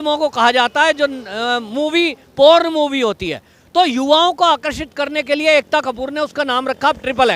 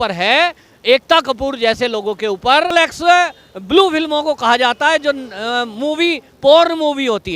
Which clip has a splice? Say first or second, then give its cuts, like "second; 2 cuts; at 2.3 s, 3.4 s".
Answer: second; 1 cut; at 2.7 s